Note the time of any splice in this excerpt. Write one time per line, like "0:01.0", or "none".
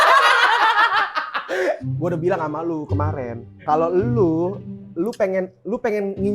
0:01.8